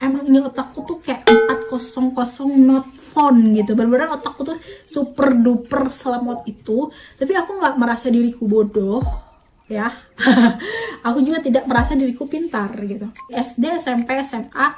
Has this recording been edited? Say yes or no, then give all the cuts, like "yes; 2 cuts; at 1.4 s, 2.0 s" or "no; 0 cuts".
yes; 1 cut; at 13.3 s